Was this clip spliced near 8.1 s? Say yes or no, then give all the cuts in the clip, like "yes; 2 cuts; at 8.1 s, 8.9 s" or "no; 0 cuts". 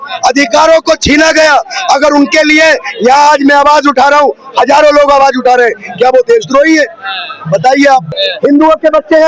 yes; 1 cut; at 8.1 s